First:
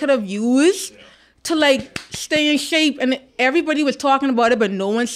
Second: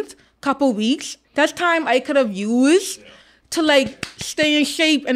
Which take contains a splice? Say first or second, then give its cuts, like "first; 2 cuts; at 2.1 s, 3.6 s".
second; 1 cut; at 1.2 s